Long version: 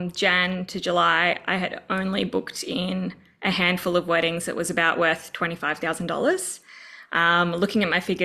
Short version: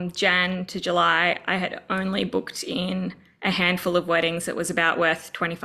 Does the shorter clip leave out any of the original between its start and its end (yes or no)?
no